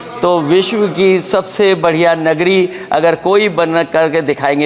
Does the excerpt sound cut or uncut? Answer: uncut